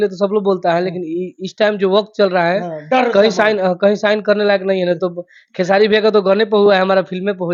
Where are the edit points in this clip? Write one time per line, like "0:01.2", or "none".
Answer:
none